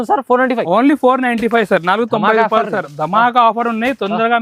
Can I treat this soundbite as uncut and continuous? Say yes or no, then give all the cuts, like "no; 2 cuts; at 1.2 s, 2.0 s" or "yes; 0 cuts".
yes; 0 cuts